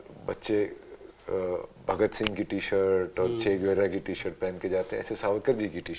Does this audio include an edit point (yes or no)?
no